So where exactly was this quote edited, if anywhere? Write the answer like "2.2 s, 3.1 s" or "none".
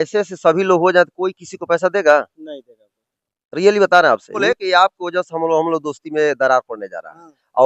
4.3 s